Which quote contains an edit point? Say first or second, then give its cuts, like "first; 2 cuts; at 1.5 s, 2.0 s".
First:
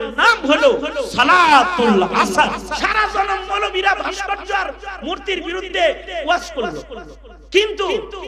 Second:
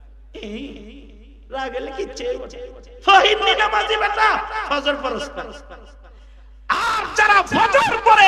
first; 1 cut; at 2.8 s